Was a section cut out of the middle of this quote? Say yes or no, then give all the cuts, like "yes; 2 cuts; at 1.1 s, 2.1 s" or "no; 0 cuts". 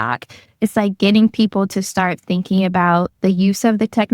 yes; 1 cut; at 3.1 s